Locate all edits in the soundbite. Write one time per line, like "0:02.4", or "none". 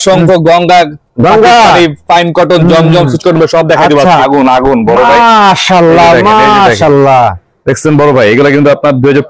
0:04.2